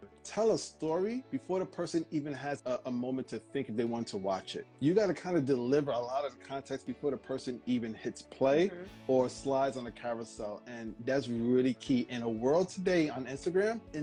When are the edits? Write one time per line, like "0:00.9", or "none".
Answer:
none

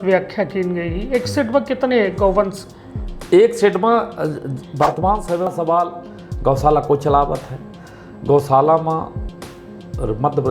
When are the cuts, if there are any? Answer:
0:05.5

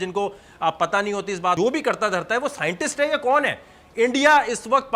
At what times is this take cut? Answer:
0:01.6

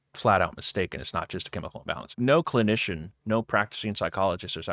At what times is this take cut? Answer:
0:02.1

